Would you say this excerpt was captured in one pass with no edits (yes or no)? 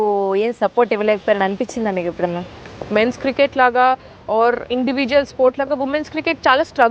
no